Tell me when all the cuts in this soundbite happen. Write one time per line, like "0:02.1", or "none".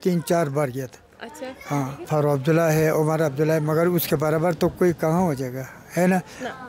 0:02.0

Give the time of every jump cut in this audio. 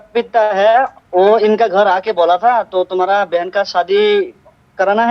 0:01.0

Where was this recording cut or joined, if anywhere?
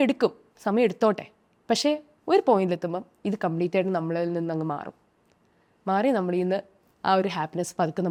none

